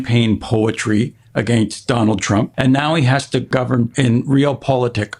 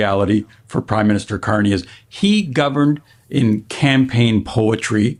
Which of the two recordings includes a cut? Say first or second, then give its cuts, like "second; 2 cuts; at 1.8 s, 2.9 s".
first; 2 cuts; at 2.5 s, 3.7 s